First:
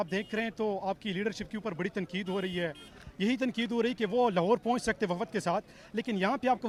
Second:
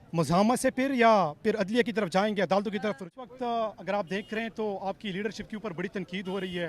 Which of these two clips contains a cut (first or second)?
second